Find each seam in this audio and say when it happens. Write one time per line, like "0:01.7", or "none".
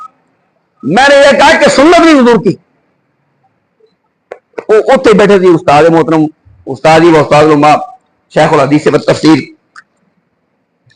none